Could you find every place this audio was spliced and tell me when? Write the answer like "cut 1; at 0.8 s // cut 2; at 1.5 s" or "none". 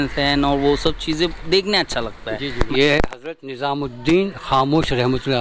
cut 1; at 2.6 s